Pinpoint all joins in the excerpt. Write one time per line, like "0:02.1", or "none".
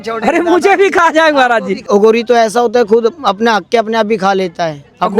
0:01.9